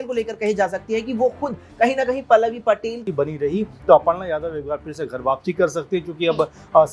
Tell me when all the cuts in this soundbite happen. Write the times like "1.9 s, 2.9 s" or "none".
3.0 s